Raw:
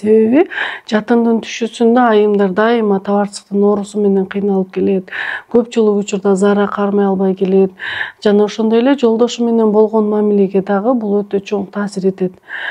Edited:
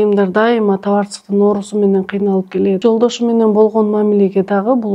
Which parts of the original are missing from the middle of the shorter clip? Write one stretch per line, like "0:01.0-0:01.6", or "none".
0:05.0-0:09.0